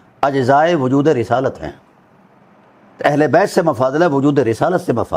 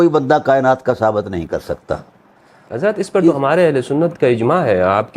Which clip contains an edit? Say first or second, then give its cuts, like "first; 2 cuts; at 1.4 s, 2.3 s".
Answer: second; 1 cut; at 2.7 s